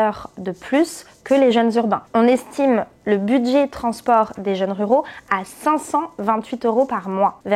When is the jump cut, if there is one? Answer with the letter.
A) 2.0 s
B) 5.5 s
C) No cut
A